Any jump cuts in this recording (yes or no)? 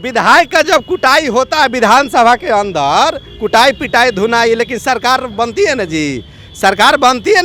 no